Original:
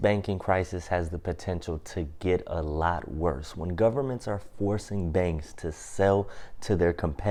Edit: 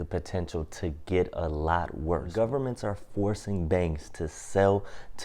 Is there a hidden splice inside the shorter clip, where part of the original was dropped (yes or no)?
yes